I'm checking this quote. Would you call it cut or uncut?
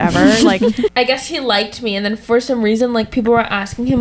cut